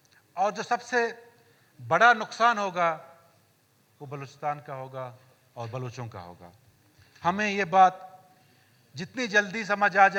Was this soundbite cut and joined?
no; 0 cuts

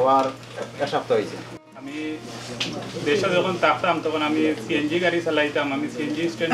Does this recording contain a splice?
yes; 1 cut; at 1.5 s

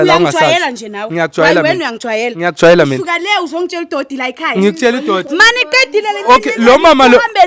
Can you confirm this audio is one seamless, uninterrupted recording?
yes; 0 cuts

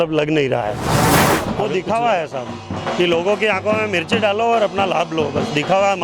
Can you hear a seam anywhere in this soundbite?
yes; 1 cut; at 1.3 s

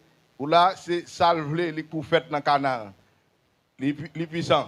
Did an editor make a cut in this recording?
no; 0 cuts

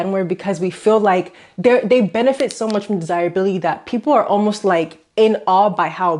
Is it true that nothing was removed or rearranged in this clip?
yes; 0 cuts

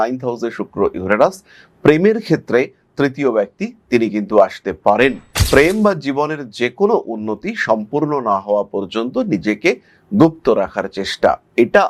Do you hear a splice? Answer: no; 0 cuts

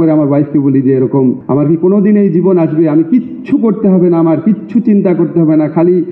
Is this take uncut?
no; 1 cut; at 1.4 s

